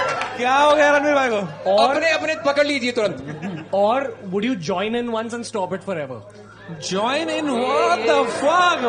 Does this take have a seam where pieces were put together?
yes; 1 cut; at 5.4 s

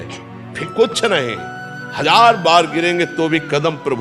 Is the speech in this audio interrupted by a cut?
no; 0 cuts

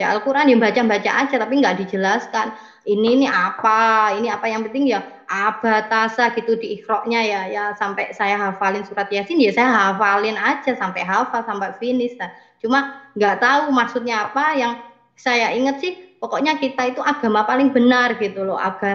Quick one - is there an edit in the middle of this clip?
no; 0 cuts

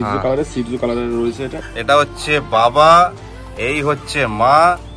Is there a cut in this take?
yes; 1 cut; at 1.6 s

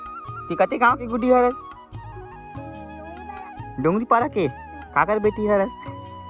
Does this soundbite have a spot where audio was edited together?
no; 0 cuts

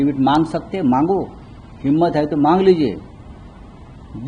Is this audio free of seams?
yes; 0 cuts

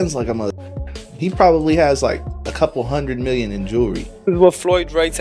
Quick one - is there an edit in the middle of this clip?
yes; 1 cut; at 4.3 s

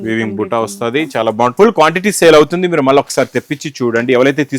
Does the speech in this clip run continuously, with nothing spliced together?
no; 1 cut; at 1.5 s

